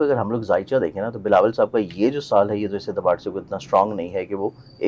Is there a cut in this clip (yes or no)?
no